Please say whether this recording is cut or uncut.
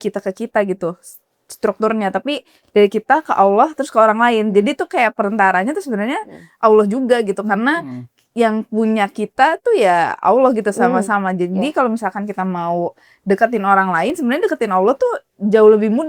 uncut